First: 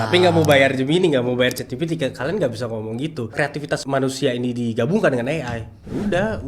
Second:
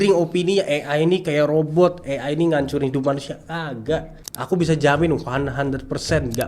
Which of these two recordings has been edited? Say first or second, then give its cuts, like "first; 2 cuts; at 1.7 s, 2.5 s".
first; 1 cut; at 3.3 s